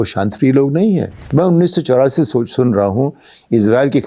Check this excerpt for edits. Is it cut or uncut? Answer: cut